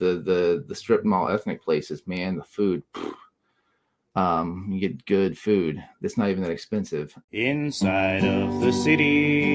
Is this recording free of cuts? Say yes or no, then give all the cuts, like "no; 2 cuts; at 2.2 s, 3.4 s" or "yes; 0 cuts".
no; 1 cut; at 7.2 s